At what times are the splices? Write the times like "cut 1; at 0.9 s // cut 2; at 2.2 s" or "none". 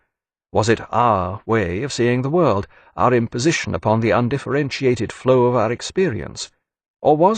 cut 1; at 3.8 s

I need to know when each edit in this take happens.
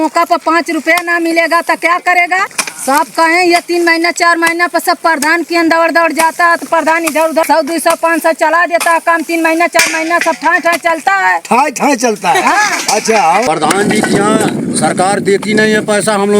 cut 1; at 2.5 s // cut 2; at 7.4 s // cut 3; at 13.5 s

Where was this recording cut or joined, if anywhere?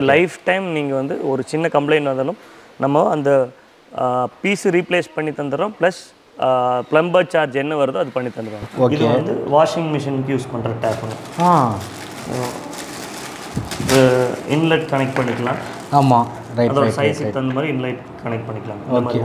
cut 1; at 8.7 s

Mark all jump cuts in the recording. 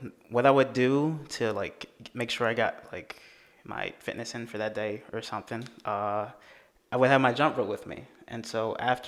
none

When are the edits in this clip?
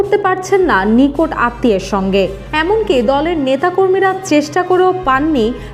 none

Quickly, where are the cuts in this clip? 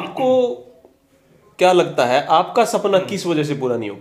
none

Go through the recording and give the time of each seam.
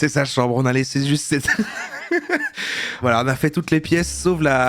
cut 1; at 3.0 s

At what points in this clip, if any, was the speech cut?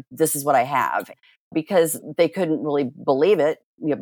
cut 1; at 2.0 s

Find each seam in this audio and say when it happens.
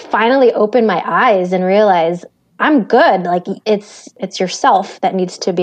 cut 1; at 4.2 s

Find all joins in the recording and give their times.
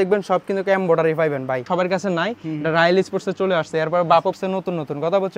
cut 1; at 1.6 s // cut 2; at 4.4 s

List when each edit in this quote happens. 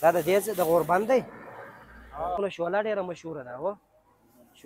cut 1; at 2.4 s

